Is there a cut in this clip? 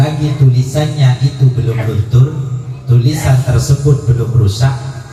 no; 0 cuts

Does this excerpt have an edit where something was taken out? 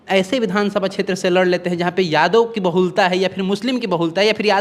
no; 0 cuts

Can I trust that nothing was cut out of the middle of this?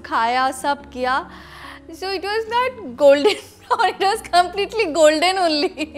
yes; 0 cuts

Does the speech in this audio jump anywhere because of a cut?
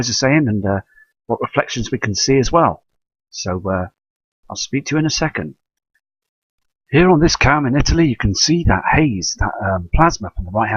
no; 0 cuts

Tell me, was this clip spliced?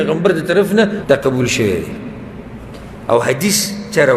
yes; 1 cut; at 1.0 s

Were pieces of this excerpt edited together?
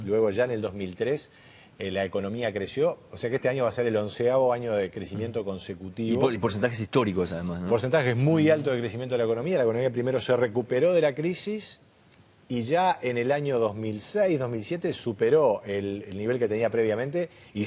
no; 0 cuts

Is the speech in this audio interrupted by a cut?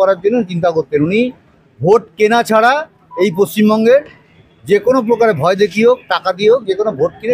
no; 0 cuts

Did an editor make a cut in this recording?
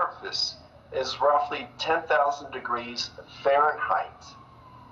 yes; 1 cut; at 1.4 s

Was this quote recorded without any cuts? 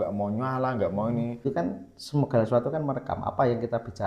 no; 1 cut; at 1.4 s

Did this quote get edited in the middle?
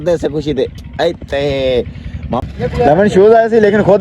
yes; 1 cut; at 2.4 s

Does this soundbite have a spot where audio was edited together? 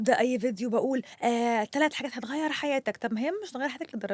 no; 0 cuts

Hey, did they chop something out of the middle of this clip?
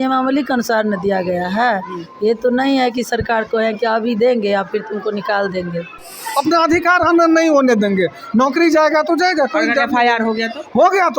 yes; 1 cut; at 6.2 s

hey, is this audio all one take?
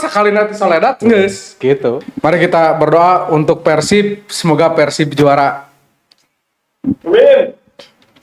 no; 1 cut; at 2.1 s

